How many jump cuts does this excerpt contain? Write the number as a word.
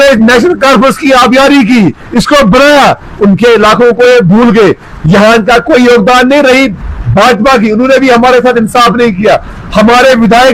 zero